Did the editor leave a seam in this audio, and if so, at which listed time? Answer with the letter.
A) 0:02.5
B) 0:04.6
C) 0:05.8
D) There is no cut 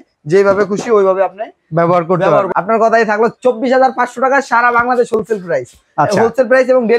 A